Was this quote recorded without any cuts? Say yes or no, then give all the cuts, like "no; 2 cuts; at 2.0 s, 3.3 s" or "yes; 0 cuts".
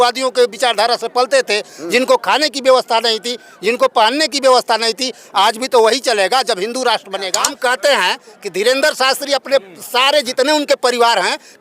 no; 1 cut; at 7.4 s